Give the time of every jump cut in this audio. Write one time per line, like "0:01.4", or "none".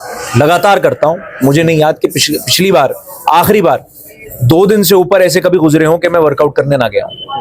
none